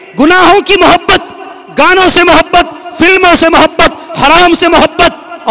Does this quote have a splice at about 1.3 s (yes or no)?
no